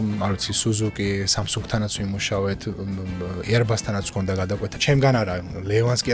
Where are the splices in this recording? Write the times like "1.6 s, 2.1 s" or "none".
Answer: 4.8 s